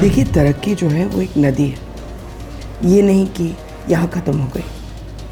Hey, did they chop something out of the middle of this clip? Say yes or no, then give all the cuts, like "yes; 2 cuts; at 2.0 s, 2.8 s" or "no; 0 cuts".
no; 0 cuts